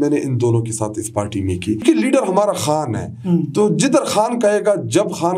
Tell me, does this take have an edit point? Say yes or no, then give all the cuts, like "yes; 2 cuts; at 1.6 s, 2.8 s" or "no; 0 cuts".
yes; 1 cut; at 1.8 s